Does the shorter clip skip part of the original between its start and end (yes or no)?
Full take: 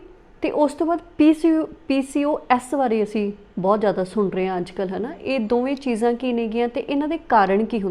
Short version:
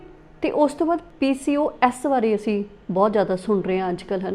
yes